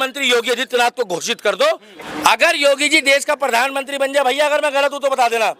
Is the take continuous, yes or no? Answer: yes